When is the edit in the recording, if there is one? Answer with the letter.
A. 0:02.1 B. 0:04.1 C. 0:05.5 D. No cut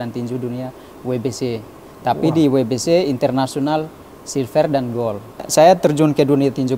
C